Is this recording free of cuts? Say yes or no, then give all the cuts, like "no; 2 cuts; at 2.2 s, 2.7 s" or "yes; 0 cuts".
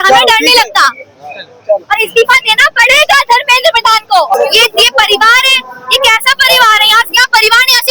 no; 1 cut; at 4.3 s